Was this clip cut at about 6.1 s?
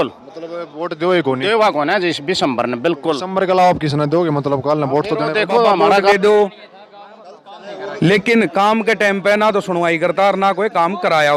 yes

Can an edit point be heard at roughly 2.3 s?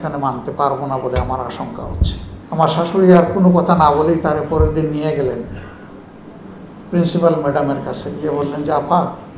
yes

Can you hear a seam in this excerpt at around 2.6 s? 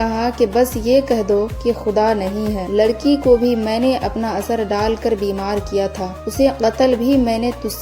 yes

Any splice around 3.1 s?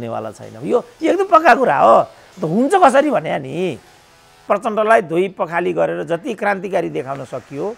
no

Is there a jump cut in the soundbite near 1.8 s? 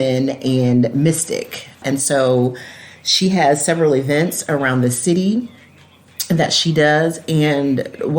yes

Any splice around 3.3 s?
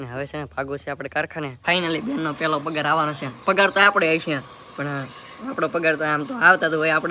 no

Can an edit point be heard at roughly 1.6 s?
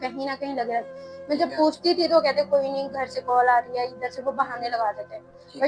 no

